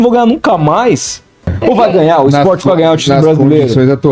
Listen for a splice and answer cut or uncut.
cut